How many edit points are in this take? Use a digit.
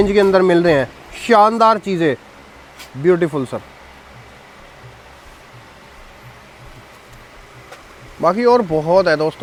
0